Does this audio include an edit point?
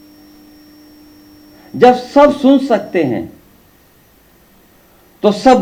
no; 0 cuts

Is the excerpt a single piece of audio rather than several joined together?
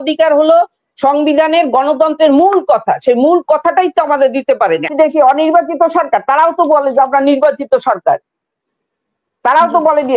no; 1 cut; at 4.9 s

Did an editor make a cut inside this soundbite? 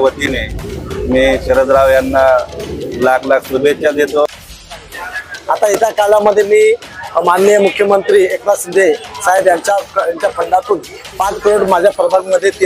yes; 1 cut; at 4.8 s

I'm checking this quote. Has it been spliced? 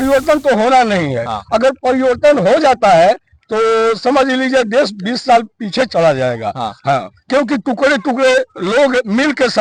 no; 0 cuts

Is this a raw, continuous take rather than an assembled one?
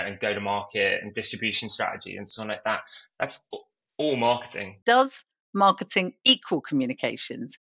no; 1 cut; at 4.8 s

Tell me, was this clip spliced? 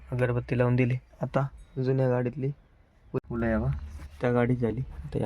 yes; 1 cut; at 3.3 s

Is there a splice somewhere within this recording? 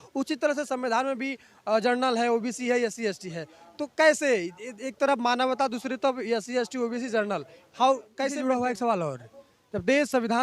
yes; 1 cut; at 8.3 s

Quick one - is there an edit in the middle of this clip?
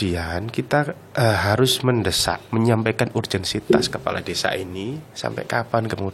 yes; 3 cuts; at 1.0 s, 2.4 s, 5.0 s

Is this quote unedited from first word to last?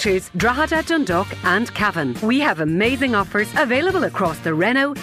yes; 0 cuts

